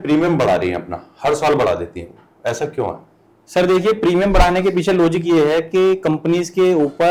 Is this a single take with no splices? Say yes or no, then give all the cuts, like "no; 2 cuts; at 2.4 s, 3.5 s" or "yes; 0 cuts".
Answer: yes; 0 cuts